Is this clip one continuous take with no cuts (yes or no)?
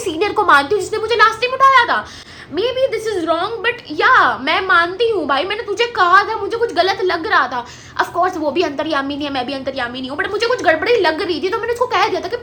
yes